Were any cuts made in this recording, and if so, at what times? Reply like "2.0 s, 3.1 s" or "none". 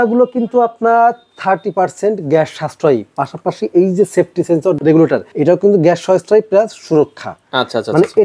4.9 s